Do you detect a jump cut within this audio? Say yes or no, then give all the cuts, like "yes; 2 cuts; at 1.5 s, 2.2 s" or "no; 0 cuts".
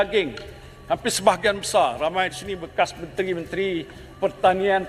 no; 0 cuts